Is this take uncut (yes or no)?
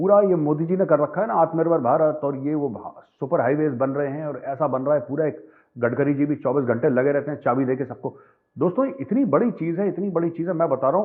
yes